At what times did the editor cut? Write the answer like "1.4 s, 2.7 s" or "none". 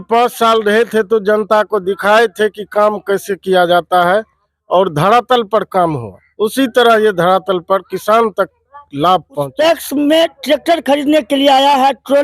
9.5 s